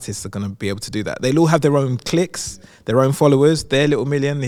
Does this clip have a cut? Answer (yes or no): no